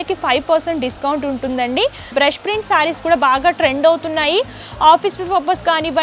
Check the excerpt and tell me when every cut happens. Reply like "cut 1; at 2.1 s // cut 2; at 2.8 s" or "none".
cut 1; at 2.1 s

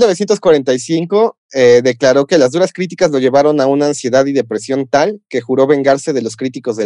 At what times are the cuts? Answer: none

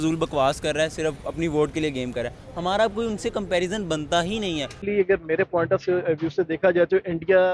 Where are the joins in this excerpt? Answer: cut 1; at 4.9 s

